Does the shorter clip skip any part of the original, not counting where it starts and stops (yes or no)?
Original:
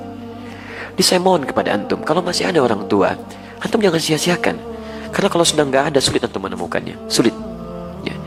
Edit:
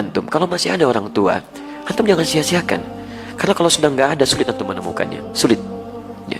no